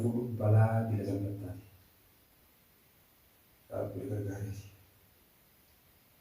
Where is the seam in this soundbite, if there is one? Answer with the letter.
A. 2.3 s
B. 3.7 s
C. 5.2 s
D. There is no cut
A